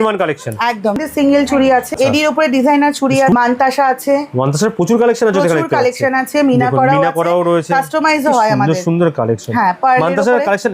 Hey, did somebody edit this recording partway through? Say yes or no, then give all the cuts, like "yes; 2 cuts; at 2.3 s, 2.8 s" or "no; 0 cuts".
yes; 3 cuts; at 1.0 s, 1.9 s, 3.3 s